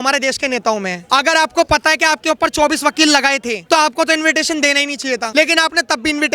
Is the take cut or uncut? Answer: cut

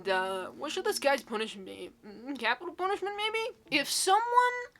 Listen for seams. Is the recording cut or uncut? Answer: cut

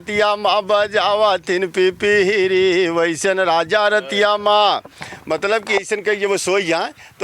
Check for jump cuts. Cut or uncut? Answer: uncut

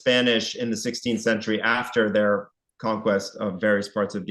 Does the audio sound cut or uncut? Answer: uncut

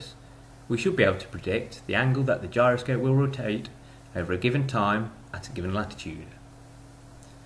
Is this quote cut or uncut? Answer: cut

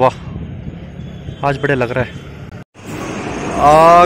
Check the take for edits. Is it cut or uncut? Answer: cut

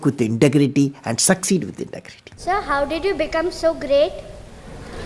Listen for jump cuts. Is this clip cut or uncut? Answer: cut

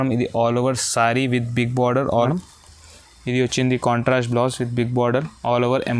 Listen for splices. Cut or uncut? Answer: cut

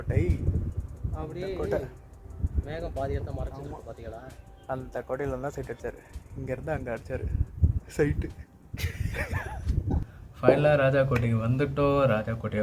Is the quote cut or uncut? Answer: cut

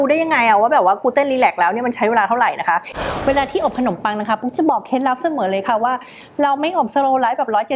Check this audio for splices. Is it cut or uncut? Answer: cut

